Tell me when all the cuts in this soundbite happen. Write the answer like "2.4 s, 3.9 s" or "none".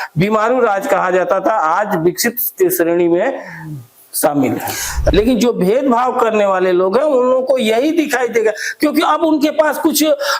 5.1 s